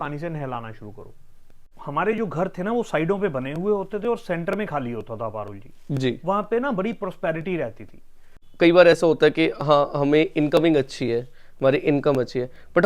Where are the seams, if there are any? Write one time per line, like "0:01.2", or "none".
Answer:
0:01.7
0:08.4